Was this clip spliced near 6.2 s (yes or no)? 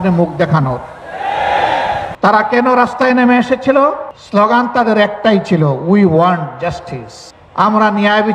no